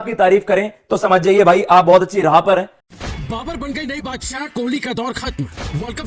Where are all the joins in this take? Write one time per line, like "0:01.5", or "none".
0:02.8